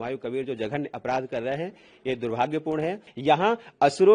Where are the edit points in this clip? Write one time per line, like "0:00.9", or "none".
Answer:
0:03.1